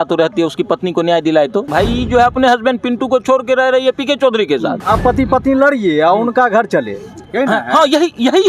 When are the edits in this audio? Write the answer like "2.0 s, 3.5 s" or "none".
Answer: 1.7 s, 4.8 s